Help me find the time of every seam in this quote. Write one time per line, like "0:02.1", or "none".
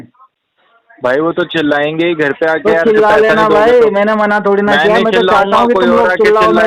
none